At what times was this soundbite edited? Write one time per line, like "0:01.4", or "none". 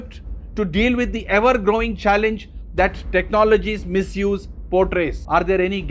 none

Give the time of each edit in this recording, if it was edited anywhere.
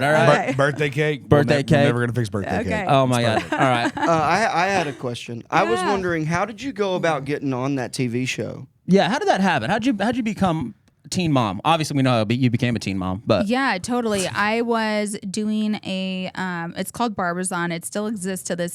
none

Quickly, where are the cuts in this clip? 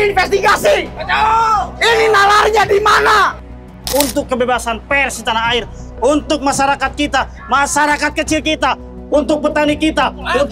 0:03.6

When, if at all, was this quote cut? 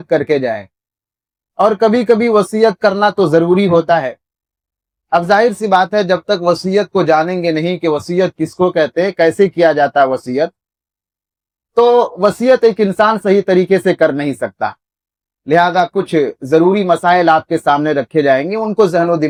none

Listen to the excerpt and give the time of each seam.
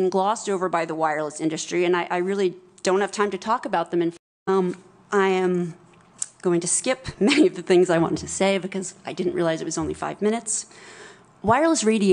0:04.1

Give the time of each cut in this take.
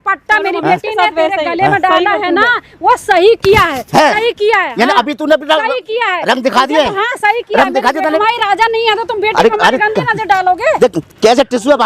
0:08.2

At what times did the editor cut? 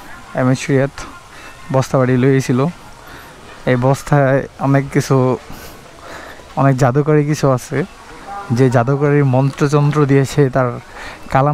none

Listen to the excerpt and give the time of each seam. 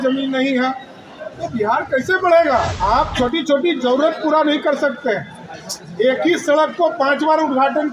0:02.7

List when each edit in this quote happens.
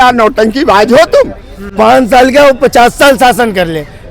0:01.6

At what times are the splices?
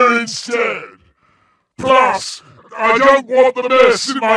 none

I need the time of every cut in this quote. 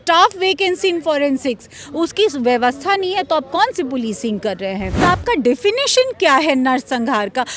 0:05.0

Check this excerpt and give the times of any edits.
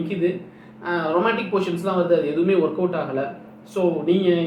none

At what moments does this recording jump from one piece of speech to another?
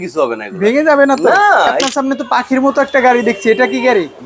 0:01.8

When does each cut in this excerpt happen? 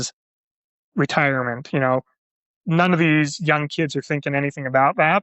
none

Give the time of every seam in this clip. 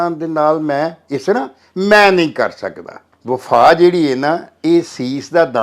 0:03.1

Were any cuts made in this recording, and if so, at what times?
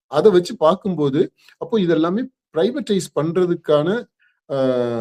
none

